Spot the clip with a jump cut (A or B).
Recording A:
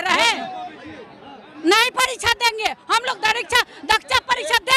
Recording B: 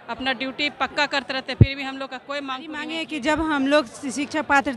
B